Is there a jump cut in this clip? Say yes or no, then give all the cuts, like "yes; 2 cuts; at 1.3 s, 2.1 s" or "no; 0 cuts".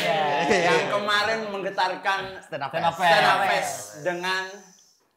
no; 0 cuts